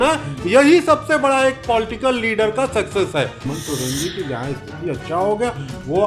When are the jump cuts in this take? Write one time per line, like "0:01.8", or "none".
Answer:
0:03.5